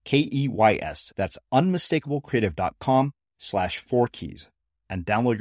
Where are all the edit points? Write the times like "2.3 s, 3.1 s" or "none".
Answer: none